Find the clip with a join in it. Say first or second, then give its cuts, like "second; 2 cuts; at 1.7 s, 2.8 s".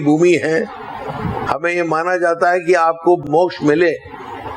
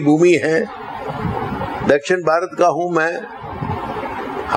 first; 2 cuts; at 1.4 s, 3.2 s